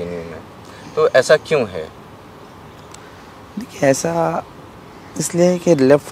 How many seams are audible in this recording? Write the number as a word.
zero